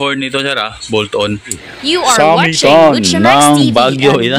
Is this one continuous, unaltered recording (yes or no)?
no